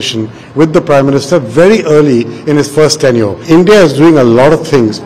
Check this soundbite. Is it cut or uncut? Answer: cut